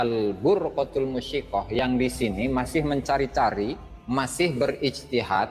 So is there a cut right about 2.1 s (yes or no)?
no